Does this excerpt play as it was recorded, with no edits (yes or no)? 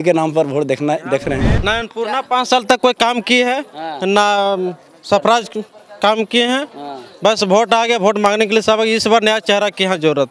no